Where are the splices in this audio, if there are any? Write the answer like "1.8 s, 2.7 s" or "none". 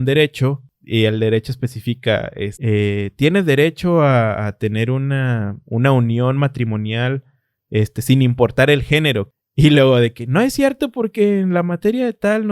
9.3 s